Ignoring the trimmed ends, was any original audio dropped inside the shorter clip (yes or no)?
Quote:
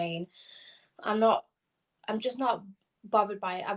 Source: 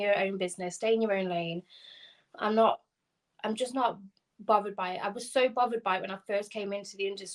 no